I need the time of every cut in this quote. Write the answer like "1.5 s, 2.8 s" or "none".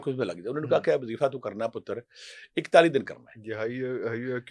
none